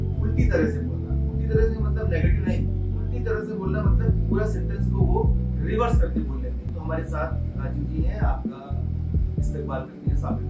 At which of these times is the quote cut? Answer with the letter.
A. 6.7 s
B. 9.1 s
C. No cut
A